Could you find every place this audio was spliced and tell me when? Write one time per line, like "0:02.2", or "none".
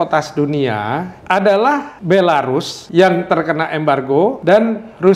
0:01.1
0:01.9
0:02.8
0:04.4